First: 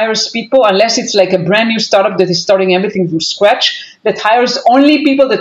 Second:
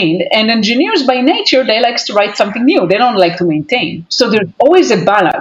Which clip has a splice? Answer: second; 1 cut; at 4.0 s

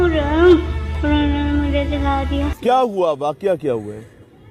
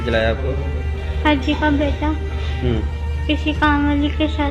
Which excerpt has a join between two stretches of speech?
first; 1 cut; at 2.6 s

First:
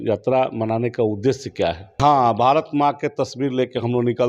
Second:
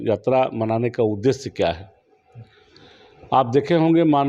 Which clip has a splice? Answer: first; 1 cut; at 2.0 s

